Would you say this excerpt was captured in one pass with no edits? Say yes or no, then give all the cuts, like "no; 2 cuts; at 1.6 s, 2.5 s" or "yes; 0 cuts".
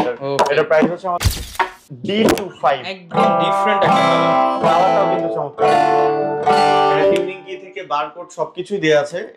no; 1 cut; at 1.3 s